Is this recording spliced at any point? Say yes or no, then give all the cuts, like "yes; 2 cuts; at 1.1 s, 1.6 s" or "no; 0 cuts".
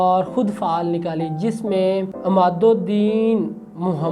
yes; 1 cut; at 2.1 s